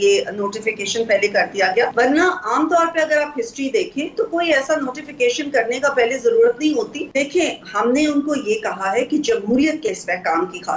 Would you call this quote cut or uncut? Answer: cut